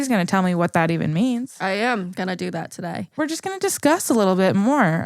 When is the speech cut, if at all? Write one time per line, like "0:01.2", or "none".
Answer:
0:03.1